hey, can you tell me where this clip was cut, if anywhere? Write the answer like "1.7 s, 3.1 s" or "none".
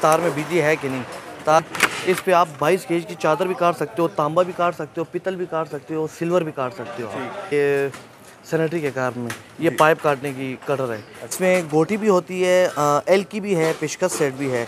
1.6 s, 7.4 s, 11.3 s